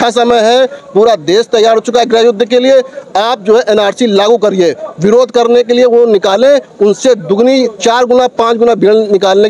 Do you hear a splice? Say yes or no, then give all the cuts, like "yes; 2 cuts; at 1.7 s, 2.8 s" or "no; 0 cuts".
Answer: no; 0 cuts